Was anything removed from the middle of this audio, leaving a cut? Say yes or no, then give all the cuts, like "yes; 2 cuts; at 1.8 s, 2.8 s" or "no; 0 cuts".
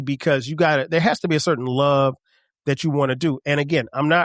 no; 0 cuts